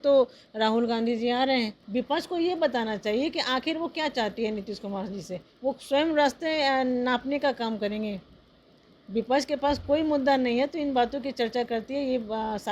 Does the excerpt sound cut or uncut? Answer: cut